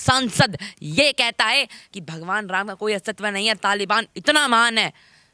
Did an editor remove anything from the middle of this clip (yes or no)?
no